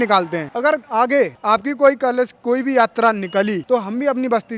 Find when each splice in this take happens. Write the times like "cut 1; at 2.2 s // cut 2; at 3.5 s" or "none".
cut 1; at 0.9 s // cut 2; at 3.6 s